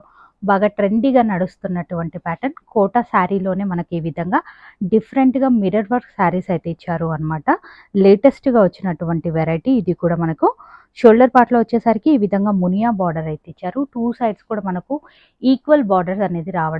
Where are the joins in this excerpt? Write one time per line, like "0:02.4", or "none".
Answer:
none